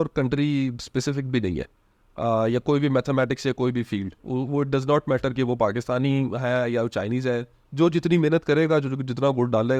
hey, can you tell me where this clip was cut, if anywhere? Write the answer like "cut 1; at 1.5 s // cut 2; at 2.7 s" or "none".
none